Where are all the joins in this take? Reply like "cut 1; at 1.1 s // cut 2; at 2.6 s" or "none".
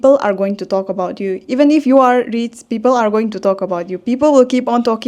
none